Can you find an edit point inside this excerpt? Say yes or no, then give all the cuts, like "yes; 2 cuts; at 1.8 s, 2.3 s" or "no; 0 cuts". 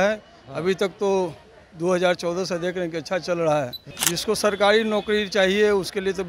yes; 1 cut; at 3.9 s